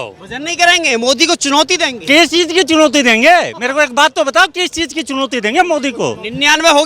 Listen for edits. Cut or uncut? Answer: uncut